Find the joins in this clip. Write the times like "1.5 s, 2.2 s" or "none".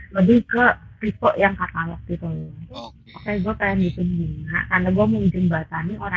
3.0 s